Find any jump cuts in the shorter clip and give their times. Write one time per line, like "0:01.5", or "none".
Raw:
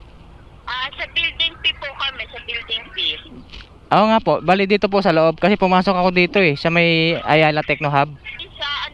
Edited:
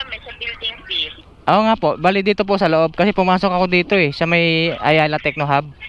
0:01.2